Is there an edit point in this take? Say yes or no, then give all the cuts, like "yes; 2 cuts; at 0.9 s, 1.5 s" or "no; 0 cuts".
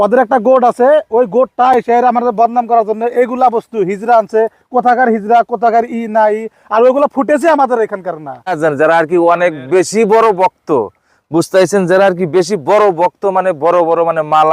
yes; 1 cut; at 8.6 s